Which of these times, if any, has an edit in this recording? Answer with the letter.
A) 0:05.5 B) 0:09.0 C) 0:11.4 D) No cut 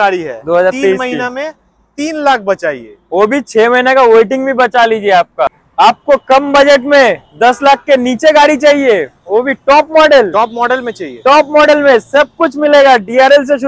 A